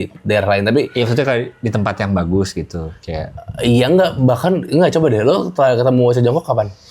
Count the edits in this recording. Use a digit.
0